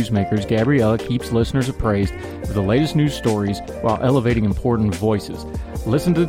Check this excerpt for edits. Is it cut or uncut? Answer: uncut